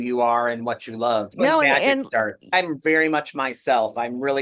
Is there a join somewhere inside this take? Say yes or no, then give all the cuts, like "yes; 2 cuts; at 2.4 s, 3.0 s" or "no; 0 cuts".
yes; 2 cuts; at 1.4 s, 2.5 s